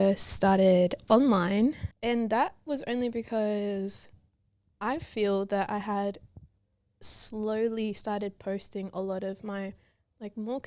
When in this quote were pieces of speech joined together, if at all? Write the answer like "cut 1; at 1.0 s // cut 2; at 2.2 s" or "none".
cut 1; at 1.9 s

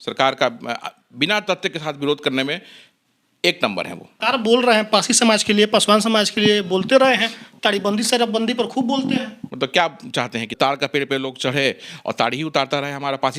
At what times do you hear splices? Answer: cut 1; at 4.1 s // cut 2; at 9.4 s // cut 3; at 10.5 s

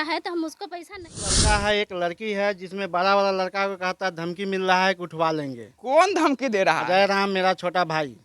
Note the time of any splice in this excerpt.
cut 1; at 1.3 s

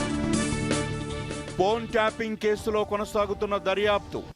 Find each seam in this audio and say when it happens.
cut 1; at 0.9 s

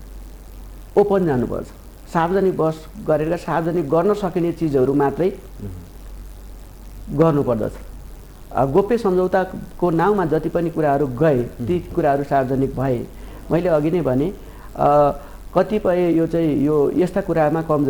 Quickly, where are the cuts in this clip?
none

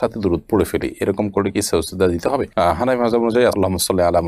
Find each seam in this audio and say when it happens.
none

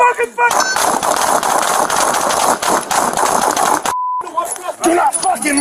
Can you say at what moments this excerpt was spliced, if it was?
cut 1; at 3.9 s

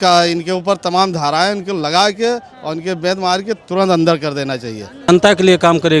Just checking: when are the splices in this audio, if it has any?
cut 1; at 5.1 s

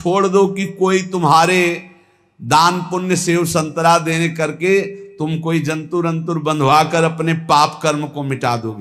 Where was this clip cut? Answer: none

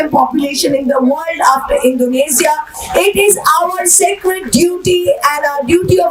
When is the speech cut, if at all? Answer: none

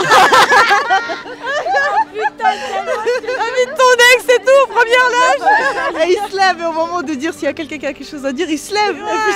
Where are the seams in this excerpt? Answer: none

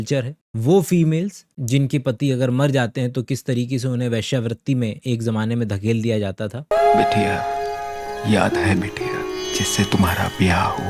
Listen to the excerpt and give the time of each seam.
none

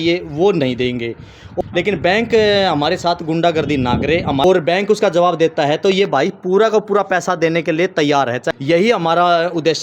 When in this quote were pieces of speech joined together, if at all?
cut 1; at 1.5 s // cut 2; at 4.4 s // cut 3; at 8.5 s

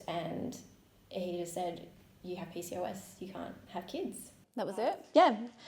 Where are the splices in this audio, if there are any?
cut 1; at 4.4 s

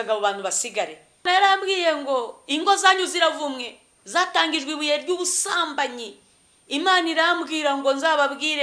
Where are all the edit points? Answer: cut 1; at 1.2 s

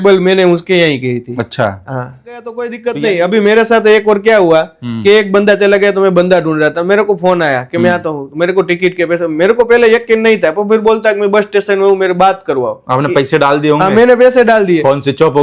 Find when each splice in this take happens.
cut 1; at 2.7 s

